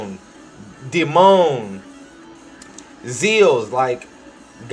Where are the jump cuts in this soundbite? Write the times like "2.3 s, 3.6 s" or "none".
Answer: 2.6 s